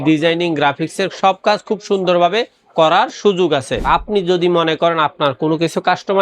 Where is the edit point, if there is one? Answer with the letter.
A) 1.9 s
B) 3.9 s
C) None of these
B